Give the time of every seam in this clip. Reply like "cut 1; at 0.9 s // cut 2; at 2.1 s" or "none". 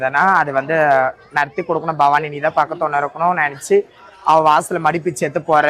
none